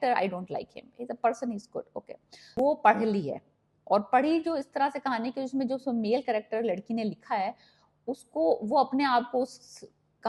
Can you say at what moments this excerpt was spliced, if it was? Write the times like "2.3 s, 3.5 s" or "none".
2.5 s